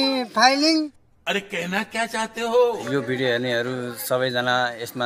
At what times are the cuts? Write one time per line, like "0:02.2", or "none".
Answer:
0:01.0
0:02.8